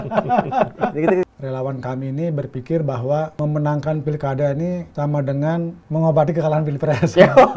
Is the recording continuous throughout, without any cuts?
no; 4 cuts; at 1.2 s, 3.3 s, 4.9 s, 5.8 s

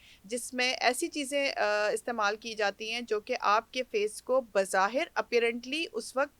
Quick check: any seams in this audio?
no; 0 cuts

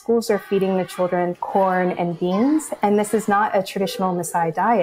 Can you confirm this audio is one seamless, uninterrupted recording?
no; 1 cut; at 1.4 s

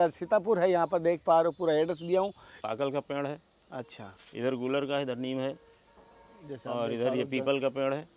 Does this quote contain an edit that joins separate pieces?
yes; 1 cut; at 2.5 s

